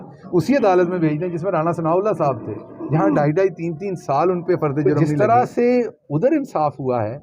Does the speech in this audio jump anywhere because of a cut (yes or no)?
yes